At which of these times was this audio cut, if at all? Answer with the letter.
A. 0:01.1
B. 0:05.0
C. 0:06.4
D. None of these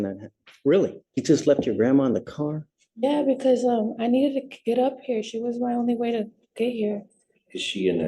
A